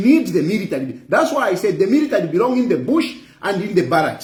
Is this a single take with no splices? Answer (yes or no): yes